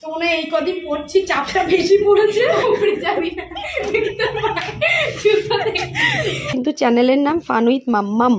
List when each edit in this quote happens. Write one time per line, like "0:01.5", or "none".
0:06.5